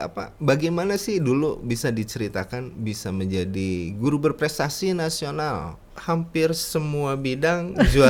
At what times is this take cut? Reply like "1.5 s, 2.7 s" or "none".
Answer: 5.9 s